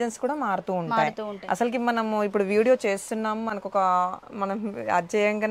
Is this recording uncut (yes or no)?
yes